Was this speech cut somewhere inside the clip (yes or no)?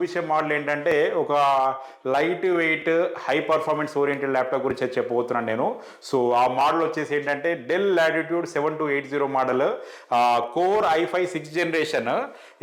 no